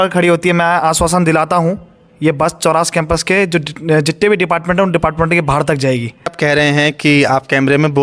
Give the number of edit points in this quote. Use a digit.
1